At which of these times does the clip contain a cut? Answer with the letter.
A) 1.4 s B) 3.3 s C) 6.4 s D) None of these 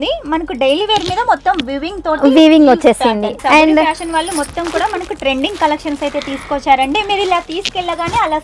B